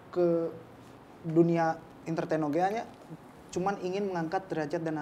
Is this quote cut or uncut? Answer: uncut